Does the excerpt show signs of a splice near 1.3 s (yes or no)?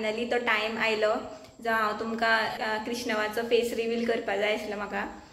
no